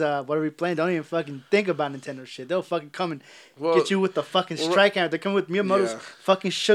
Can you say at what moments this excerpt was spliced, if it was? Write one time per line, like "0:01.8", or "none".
none